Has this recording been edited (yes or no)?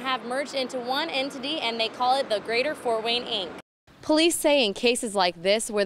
yes